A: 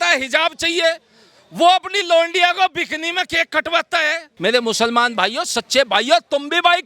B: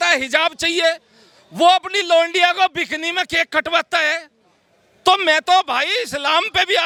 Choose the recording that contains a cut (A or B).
A